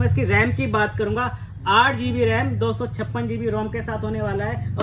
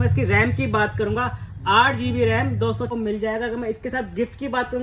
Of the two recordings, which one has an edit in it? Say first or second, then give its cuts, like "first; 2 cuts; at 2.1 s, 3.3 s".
second; 1 cut; at 2.9 s